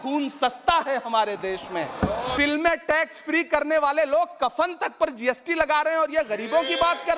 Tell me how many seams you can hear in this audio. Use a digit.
1